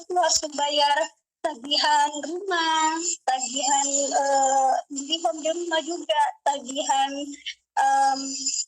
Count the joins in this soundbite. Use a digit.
0